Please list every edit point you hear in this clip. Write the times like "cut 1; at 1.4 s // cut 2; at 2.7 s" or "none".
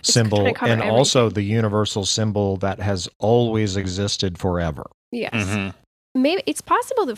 cut 1; at 5.8 s